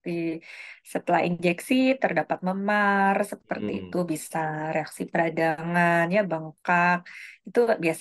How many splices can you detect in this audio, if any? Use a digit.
0